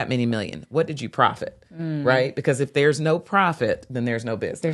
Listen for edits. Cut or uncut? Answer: uncut